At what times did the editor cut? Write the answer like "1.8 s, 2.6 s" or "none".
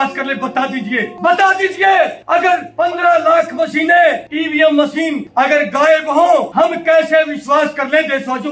1.1 s, 2.5 s, 4.3 s, 5.2 s, 6.5 s